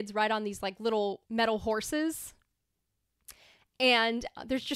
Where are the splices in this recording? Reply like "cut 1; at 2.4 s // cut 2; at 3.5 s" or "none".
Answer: cut 1; at 1.2 s